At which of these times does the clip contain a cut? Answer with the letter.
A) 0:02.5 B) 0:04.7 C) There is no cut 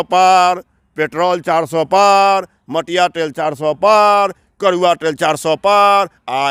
C